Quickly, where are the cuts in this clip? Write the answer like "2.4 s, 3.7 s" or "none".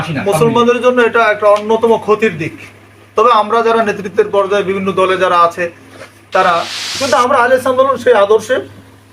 6.9 s